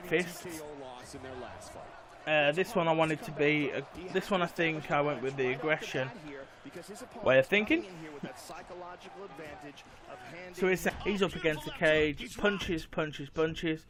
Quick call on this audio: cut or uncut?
uncut